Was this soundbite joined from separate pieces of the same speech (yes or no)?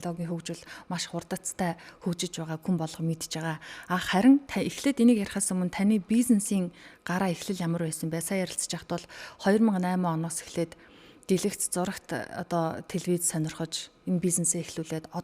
no